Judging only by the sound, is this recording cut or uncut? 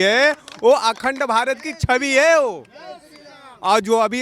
uncut